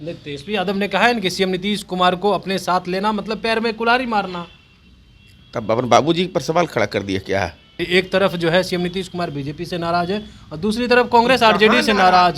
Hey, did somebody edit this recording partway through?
yes; 1 cut; at 7.8 s

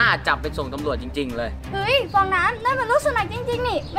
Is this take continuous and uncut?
no; 1 cut; at 1.5 s

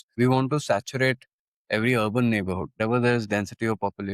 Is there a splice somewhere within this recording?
yes; 1 cut; at 2.8 s

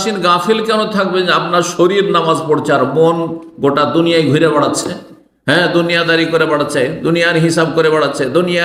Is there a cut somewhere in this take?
no; 0 cuts

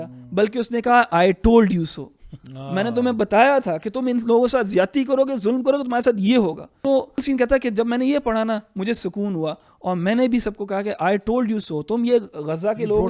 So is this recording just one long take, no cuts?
no; 1 cut; at 7.2 s

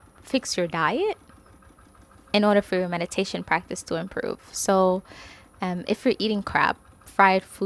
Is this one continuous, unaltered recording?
yes; 0 cuts

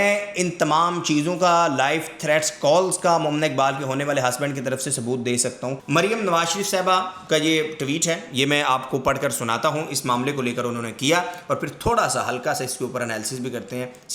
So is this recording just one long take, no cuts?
no; 1 cut; at 5.7 s

